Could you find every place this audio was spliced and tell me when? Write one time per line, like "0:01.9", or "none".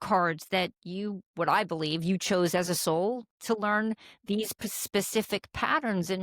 none